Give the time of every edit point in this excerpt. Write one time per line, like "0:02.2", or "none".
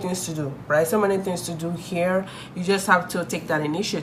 none